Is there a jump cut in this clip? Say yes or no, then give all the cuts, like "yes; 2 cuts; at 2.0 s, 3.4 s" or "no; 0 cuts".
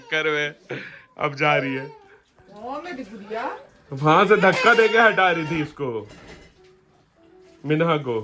no; 0 cuts